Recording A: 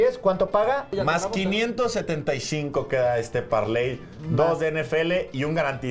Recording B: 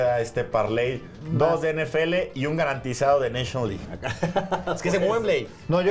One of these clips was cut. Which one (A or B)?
B